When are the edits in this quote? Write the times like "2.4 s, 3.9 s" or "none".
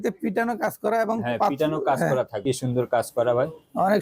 2.3 s